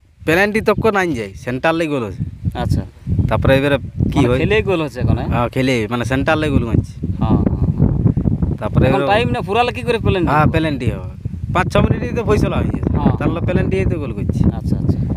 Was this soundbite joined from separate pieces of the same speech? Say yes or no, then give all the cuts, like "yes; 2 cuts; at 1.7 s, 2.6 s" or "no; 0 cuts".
no; 0 cuts